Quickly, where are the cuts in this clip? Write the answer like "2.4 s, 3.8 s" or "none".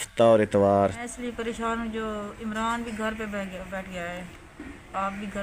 1.1 s